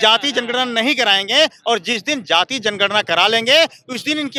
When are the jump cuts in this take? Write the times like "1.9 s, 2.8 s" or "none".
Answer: none